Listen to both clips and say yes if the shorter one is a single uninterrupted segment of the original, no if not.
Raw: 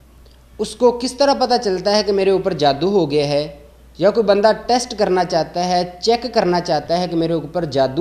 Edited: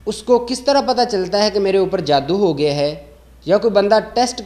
yes